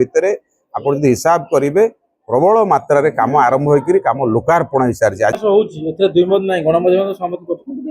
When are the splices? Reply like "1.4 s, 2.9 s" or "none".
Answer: 5.4 s